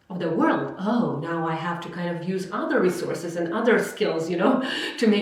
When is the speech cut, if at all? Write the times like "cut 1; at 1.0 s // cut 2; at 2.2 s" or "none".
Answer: none